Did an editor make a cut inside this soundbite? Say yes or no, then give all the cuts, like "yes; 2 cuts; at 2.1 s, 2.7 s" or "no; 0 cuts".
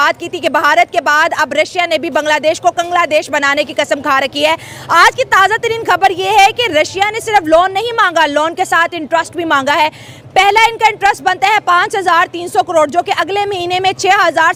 no; 0 cuts